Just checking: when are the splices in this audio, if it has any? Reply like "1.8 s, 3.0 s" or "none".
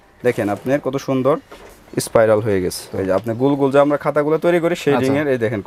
2.9 s